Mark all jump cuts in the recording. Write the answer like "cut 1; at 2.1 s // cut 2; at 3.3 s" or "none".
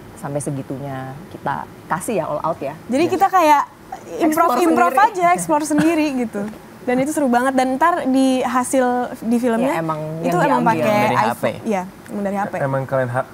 cut 1; at 2.8 s